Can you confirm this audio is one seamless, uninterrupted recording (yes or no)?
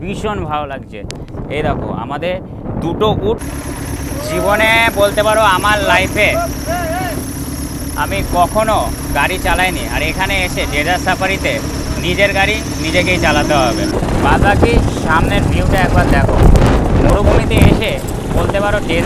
no